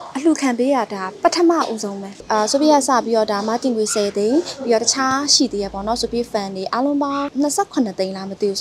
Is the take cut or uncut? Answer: cut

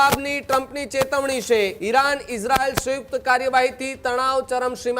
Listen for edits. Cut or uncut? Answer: cut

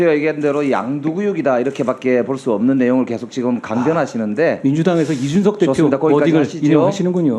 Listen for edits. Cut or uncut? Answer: uncut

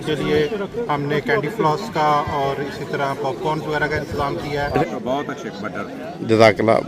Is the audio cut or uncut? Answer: cut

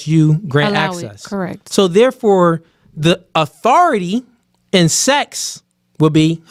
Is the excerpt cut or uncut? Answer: uncut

